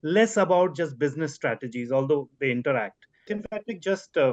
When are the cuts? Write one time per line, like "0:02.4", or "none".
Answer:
0:03.4